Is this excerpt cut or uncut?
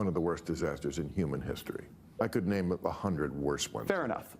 cut